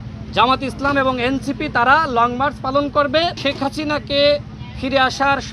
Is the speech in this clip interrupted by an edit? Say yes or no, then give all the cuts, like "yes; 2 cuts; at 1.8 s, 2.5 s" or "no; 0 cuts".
yes; 1 cut; at 3.4 s